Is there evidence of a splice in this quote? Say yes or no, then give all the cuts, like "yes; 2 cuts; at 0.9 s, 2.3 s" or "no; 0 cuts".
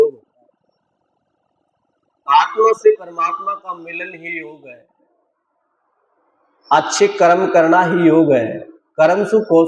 no; 0 cuts